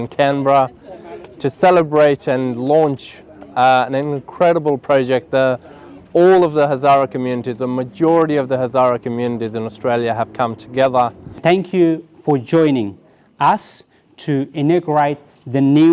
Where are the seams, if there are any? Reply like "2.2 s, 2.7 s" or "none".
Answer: 11.4 s